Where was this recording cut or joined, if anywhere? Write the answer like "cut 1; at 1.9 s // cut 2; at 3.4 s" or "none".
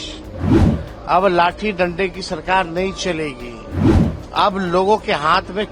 cut 1; at 3.8 s